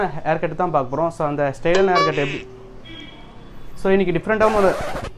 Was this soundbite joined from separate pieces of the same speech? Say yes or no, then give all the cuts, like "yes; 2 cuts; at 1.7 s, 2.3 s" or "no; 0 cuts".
no; 0 cuts